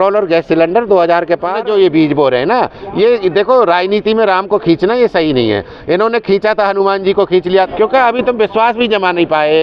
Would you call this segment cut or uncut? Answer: cut